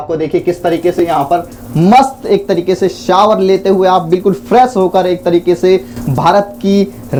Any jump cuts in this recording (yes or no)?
no